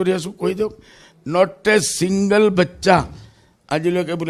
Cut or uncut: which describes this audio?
uncut